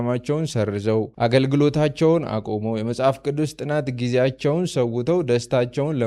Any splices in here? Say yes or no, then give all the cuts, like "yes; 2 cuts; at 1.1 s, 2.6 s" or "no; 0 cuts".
no; 0 cuts